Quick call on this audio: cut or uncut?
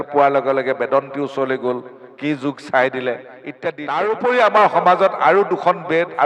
cut